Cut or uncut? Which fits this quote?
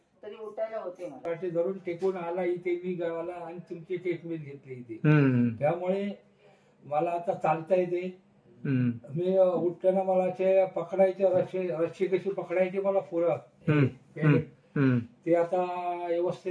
cut